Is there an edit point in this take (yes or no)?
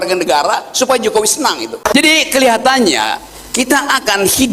yes